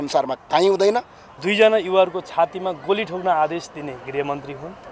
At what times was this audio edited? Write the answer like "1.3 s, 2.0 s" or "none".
1.2 s